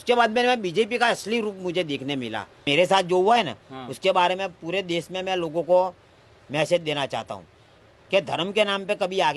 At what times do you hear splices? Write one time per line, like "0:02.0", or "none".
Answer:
0:02.7